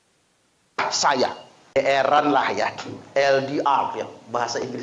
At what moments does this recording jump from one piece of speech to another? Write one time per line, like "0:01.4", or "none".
0:01.8